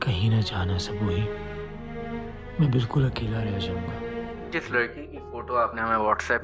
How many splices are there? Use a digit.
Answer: 1